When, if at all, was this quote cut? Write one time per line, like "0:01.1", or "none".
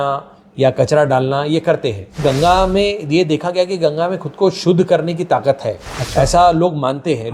0:02.2